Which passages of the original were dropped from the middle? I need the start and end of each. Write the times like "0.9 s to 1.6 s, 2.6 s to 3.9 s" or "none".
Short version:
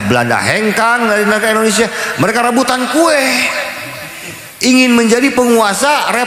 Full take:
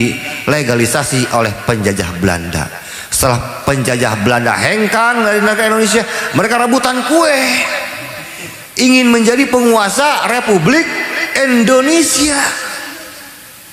none